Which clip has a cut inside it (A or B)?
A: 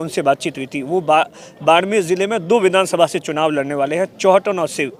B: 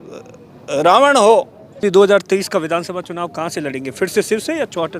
B